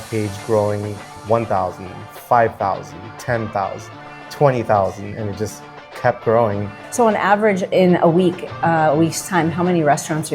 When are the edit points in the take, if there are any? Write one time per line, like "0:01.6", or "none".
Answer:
0:01.1
0:06.8